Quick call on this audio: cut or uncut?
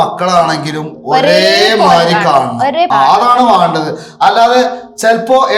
cut